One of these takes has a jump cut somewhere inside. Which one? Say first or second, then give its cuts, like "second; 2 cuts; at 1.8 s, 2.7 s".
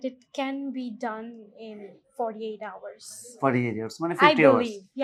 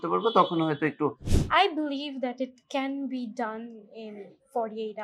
second; 1 cut; at 1.3 s